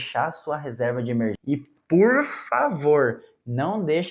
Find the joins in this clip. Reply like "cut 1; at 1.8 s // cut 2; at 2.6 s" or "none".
cut 1; at 1.4 s